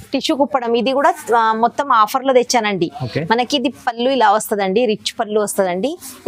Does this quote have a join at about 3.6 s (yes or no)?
no